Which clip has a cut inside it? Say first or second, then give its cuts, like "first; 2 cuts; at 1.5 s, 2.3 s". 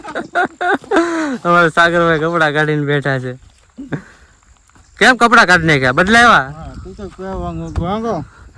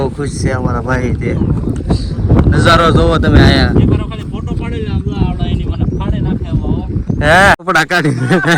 second; 1 cut; at 7.6 s